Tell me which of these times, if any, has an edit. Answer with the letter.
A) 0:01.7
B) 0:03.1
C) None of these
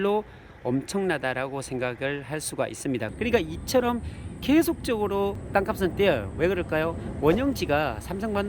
B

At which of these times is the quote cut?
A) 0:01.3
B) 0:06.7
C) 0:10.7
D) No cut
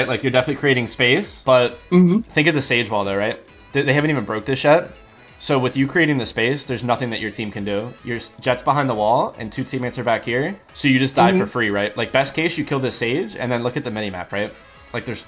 A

